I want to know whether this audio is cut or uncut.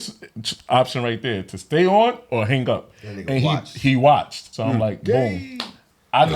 cut